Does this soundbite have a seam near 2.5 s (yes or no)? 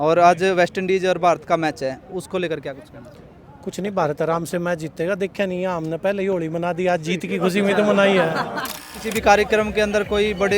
no